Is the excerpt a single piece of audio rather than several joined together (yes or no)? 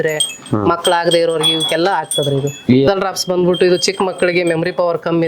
no